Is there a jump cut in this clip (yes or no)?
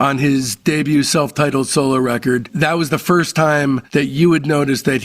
yes